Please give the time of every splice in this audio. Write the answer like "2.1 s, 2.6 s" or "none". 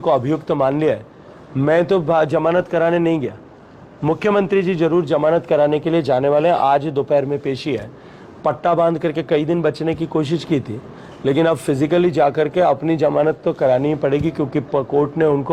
none